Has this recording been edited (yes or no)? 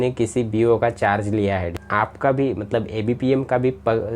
yes